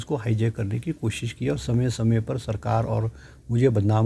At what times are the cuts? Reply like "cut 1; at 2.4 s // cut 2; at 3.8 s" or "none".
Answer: none

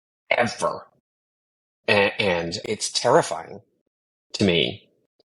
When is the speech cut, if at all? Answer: cut 1; at 2.6 s

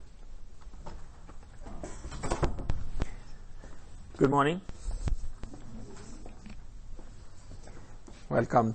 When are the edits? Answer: cut 1; at 1.6 s

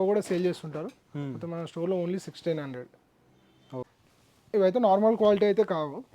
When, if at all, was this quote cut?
cut 1; at 3.9 s

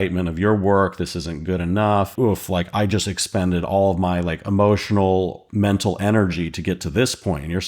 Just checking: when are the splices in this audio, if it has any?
cut 1; at 2.1 s // cut 2; at 5.5 s

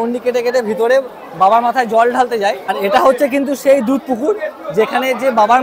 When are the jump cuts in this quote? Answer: cut 1; at 2.8 s

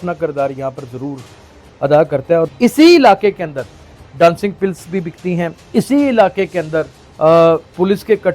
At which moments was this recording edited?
cut 1; at 2.5 s

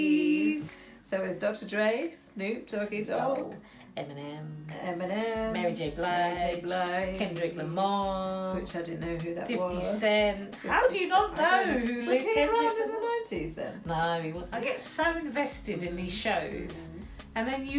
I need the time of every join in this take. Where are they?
cut 1; at 14.4 s

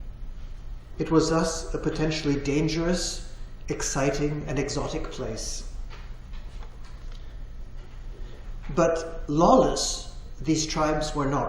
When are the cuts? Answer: cut 1; at 2.5 s

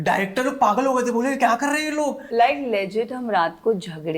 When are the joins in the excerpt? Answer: cut 1; at 2.3 s

